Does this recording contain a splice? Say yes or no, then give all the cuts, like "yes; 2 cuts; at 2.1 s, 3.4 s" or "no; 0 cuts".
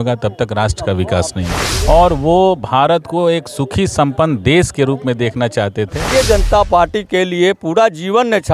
yes; 2 cuts; at 1.6 s, 6.0 s